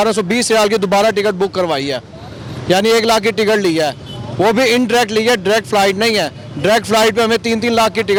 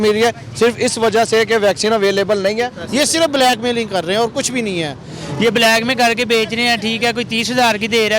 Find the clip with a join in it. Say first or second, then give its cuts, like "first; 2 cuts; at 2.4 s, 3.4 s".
second; 2 cuts; at 2.8 s, 5.1 s